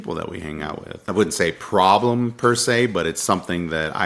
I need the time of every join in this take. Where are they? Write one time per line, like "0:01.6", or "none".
0:00.9